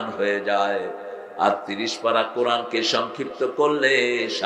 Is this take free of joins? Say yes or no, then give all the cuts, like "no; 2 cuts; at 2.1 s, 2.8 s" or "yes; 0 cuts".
yes; 0 cuts